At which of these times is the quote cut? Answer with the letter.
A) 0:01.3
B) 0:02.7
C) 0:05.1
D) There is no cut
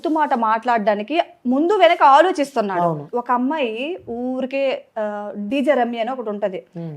B